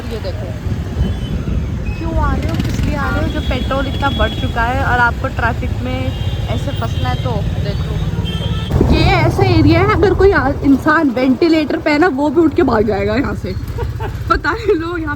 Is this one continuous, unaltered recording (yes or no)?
no